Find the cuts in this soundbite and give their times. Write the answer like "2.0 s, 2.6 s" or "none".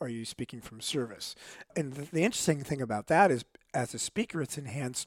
1.7 s